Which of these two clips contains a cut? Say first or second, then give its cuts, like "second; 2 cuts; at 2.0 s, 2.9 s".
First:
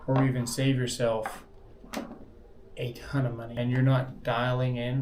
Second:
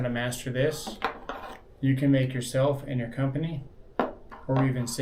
first; 1 cut; at 3.4 s